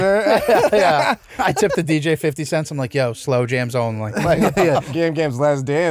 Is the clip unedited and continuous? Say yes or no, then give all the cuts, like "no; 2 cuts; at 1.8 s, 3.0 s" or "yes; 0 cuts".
no; 2 cuts; at 1.3 s, 4.9 s